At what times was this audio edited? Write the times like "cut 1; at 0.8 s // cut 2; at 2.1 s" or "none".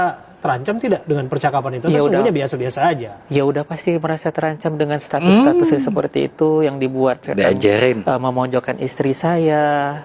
none